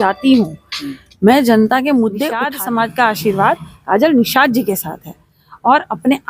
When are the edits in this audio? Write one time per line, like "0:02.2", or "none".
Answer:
0:02.4